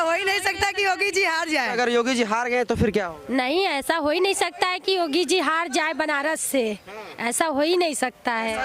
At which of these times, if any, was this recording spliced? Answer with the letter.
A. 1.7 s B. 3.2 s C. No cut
A